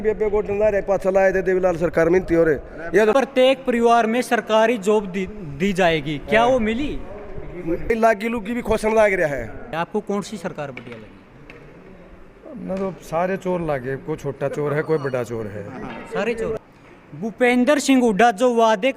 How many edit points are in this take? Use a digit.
4